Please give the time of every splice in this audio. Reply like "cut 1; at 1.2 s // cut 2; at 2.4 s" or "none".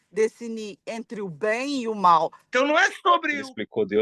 cut 1; at 2.4 s